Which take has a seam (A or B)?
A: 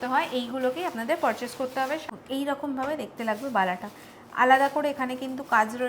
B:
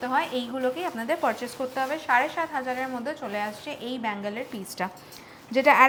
A